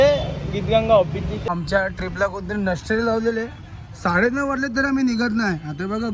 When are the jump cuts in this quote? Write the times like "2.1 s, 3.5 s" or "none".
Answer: 1.5 s